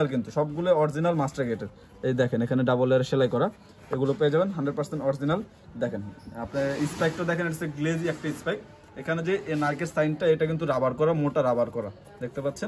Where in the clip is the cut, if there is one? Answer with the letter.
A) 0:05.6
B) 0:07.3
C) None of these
C